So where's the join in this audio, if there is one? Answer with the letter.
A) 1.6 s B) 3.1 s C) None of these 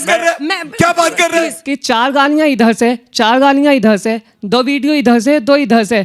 A